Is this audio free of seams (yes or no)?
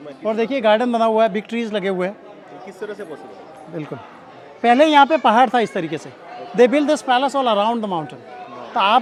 yes